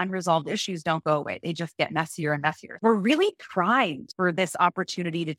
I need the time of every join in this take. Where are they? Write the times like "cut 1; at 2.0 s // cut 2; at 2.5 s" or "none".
cut 1; at 2.7 s // cut 2; at 4.0 s